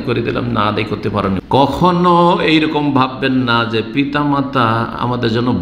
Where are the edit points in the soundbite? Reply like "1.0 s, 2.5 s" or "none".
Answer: 1.4 s